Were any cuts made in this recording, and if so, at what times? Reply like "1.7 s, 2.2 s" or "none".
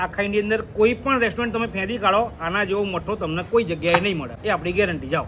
4.3 s